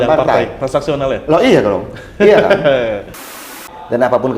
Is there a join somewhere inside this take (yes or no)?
yes